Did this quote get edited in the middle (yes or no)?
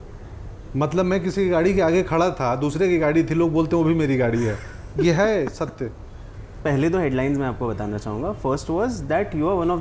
yes